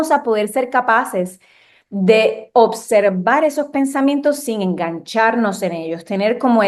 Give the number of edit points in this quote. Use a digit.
0